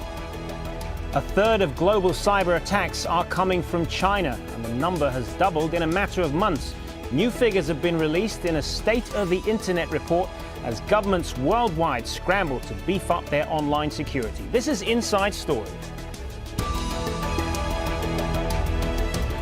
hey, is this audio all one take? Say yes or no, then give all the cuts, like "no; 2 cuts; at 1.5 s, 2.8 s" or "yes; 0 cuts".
no; 1 cut; at 1.0 s